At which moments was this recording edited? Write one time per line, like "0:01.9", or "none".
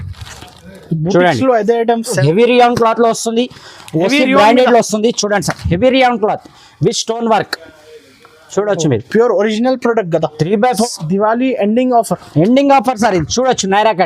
0:02.2
0:10.9